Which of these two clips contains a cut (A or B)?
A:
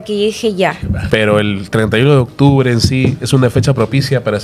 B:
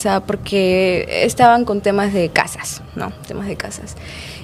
A